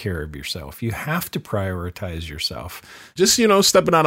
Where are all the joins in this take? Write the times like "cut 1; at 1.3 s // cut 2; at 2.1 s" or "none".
cut 1; at 3.2 s